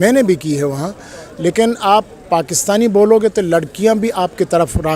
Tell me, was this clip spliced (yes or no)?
no